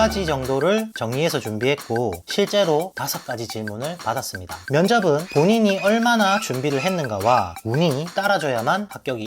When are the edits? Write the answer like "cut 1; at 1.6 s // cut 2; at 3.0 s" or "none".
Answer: cut 1; at 2.2 s // cut 2; at 4.6 s